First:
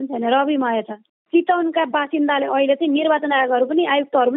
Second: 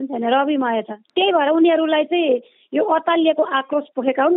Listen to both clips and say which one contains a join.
first; 1 cut; at 1.0 s

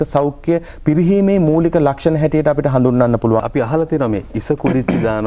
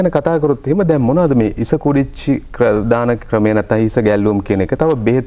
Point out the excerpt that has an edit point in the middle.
first; 1 cut; at 3.5 s

